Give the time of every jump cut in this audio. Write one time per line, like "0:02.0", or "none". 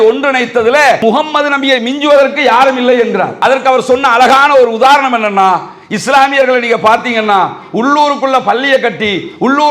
0:01.0
0:03.3